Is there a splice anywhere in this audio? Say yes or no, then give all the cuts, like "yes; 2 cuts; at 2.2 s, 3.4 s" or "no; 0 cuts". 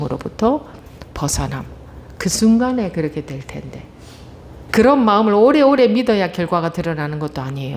yes; 1 cut; at 4.6 s